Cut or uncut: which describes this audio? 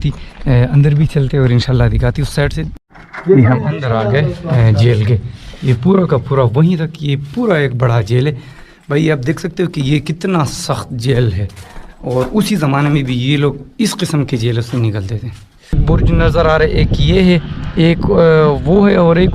cut